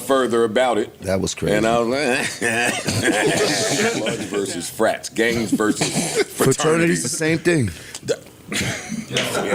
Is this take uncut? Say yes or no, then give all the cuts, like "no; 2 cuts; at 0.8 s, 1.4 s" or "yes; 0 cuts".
no; 1 cut; at 4.2 s